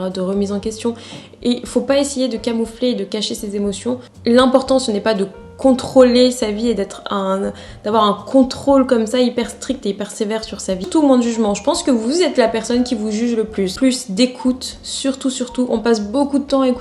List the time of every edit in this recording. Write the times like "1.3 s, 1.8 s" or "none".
4.1 s, 10.9 s, 13.8 s